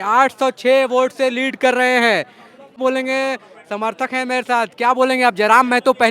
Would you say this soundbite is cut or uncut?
cut